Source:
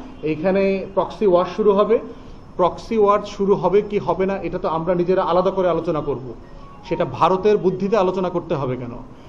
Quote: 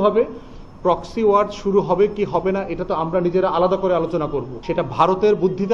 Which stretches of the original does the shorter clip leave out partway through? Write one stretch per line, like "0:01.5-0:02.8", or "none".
0:06.3-0:06.8